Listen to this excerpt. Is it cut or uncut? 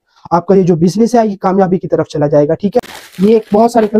cut